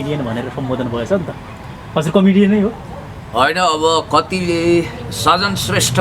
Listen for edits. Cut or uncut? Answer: uncut